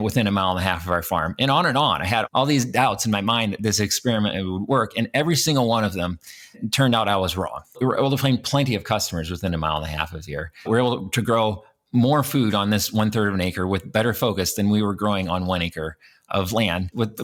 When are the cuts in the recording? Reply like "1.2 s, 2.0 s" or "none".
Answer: none